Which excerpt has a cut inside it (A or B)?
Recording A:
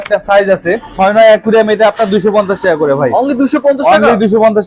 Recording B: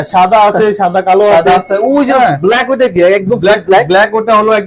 A